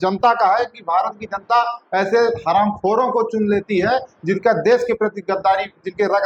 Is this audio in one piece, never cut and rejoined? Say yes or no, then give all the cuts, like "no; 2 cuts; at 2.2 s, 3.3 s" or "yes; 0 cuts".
yes; 0 cuts